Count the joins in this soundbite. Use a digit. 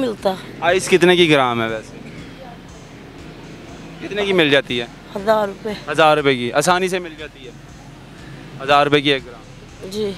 0